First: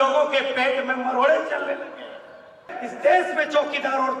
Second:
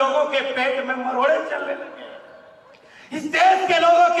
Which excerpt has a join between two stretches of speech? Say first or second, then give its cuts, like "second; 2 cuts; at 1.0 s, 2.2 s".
first; 1 cut; at 2.8 s